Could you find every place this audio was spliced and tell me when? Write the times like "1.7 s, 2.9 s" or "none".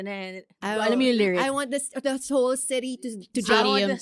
none